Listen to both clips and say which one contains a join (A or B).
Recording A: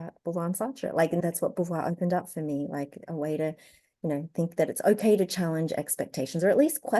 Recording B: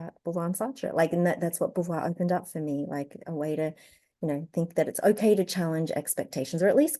A